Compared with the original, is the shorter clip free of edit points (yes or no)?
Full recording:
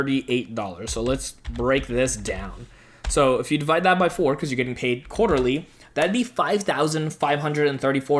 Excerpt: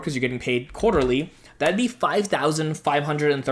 yes